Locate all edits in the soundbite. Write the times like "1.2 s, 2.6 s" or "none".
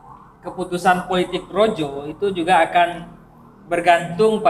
none